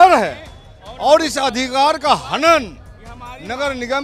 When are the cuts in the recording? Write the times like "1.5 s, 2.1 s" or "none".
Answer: none